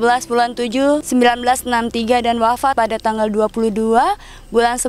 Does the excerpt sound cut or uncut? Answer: cut